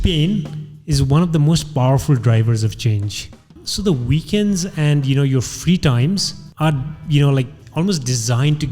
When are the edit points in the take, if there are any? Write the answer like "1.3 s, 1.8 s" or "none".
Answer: 3.6 s, 6.4 s, 7.6 s